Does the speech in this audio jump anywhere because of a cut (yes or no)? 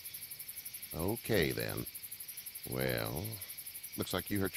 yes